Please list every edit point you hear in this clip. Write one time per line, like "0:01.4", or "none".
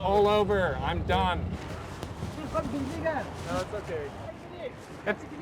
0:01.6
0:04.4